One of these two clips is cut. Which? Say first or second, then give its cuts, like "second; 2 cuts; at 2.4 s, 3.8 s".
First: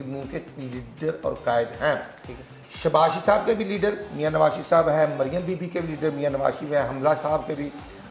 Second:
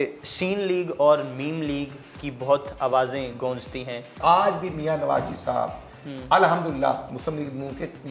second; 1 cut; at 4.2 s